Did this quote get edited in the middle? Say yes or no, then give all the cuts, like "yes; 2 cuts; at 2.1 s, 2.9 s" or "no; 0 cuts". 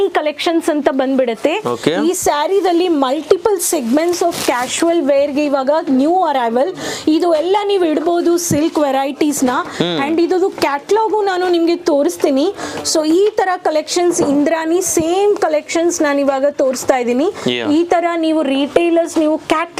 no; 0 cuts